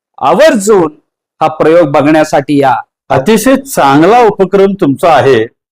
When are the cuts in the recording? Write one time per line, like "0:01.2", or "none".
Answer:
0:02.9